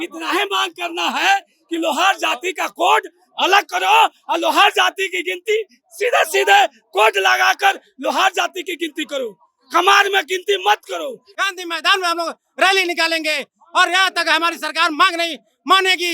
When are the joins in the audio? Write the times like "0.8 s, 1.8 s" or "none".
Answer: 11.3 s